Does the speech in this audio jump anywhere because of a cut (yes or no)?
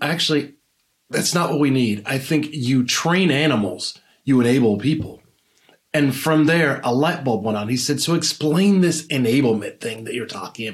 no